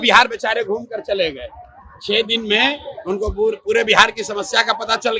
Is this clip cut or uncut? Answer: uncut